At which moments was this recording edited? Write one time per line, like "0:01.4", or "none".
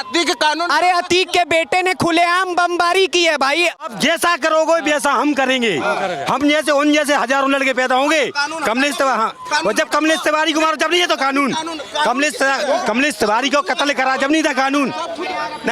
0:03.9